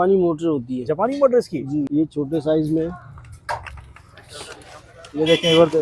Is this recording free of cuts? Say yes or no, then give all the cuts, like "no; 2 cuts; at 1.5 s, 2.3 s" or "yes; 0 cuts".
no; 1 cut; at 1.9 s